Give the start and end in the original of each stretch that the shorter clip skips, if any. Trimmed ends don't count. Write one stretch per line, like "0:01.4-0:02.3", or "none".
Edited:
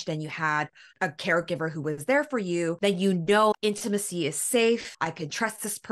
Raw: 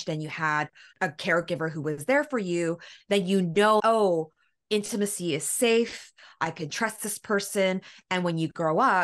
0:02.8-0:03.0
0:03.8-0:04.6
0:06.0-0:06.3